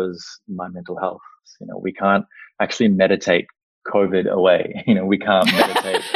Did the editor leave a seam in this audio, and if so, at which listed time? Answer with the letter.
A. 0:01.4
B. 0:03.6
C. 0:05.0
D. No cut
A